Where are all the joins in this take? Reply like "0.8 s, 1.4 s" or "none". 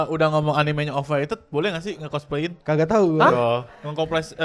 2.6 s